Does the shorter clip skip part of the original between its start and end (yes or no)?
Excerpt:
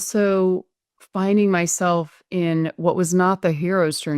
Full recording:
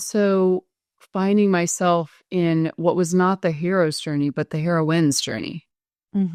no